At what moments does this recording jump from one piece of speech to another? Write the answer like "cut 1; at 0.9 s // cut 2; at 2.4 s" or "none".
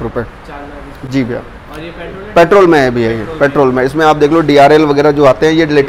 none